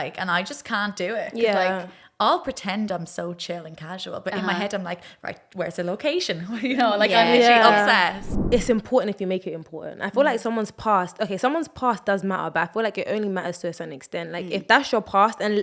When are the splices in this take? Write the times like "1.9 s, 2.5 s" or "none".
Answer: 8.3 s